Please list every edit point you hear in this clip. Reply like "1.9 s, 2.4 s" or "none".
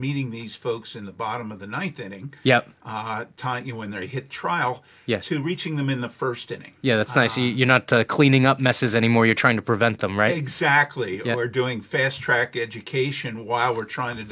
none